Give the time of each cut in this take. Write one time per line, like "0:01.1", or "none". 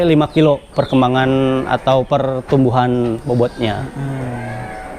none